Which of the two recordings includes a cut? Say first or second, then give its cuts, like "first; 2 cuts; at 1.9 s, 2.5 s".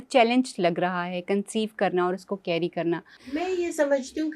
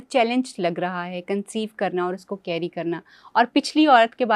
first; 1 cut; at 3.1 s